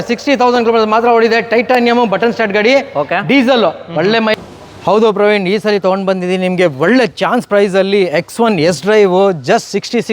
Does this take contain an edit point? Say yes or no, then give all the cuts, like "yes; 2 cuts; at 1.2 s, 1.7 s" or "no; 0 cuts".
yes; 1 cut; at 4.3 s